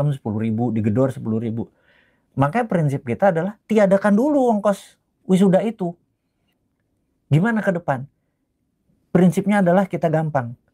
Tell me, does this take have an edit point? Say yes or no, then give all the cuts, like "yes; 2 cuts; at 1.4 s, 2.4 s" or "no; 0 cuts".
yes; 1 cut; at 6.3 s